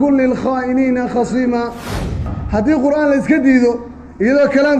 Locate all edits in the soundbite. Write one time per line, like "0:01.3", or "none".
0:02.3